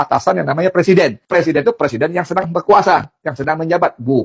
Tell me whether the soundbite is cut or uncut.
cut